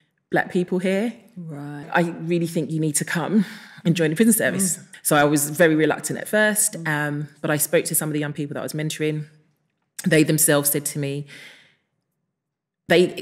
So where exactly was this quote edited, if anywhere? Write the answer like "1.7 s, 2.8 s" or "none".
1.8 s, 4.8 s